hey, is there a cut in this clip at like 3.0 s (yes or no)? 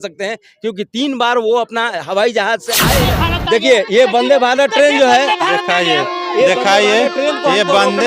yes